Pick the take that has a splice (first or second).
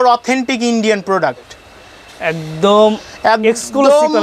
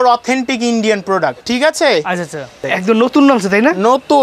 second